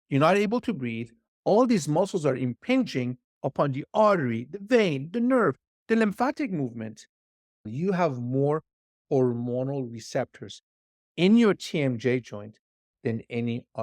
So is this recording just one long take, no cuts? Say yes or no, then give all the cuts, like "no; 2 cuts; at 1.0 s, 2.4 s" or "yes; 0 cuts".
no; 1 cut; at 7.6 s